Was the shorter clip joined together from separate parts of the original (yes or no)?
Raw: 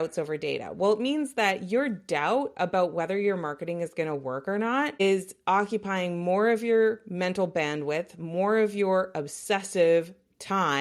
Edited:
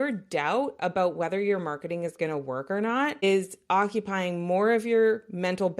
no